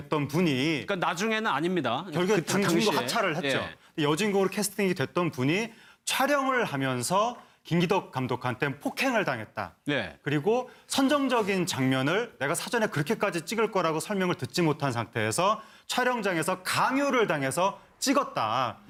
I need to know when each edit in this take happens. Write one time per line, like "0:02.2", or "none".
none